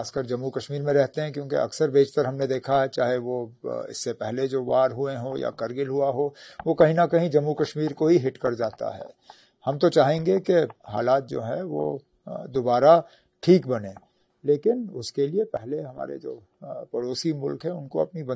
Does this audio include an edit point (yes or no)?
no